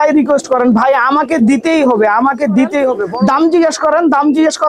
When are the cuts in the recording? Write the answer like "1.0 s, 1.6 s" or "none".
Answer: 3.1 s